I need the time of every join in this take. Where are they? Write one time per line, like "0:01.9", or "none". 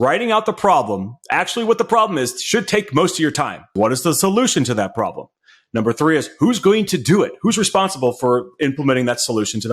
0:03.7